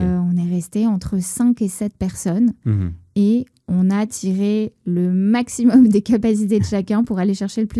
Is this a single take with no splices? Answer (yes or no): yes